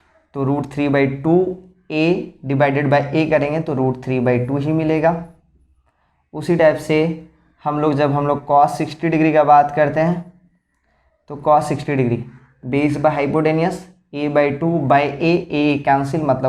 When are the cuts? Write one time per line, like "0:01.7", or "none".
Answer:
none